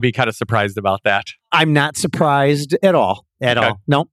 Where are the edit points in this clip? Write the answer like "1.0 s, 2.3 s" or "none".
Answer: none

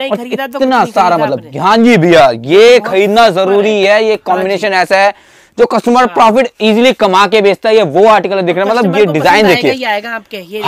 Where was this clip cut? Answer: none

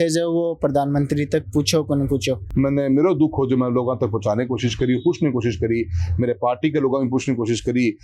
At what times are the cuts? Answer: 2.4 s

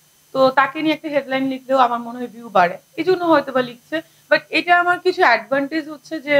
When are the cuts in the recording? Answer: none

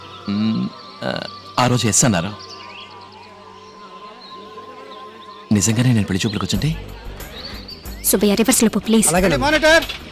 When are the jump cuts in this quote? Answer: none

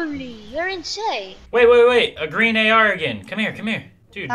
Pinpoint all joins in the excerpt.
1.3 s

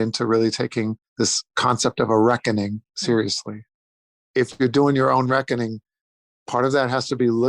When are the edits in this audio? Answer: 1.4 s, 2.9 s, 3.9 s

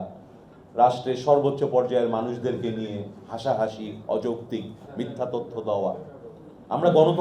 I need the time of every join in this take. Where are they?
none

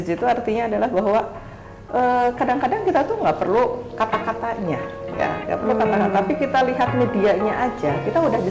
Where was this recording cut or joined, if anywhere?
none

